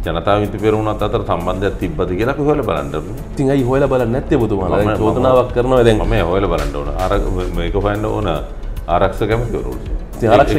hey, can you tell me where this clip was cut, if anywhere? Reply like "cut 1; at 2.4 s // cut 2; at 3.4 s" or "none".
none